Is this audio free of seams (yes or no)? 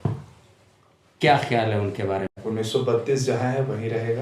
no